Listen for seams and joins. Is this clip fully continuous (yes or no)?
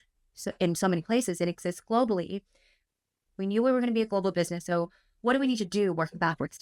yes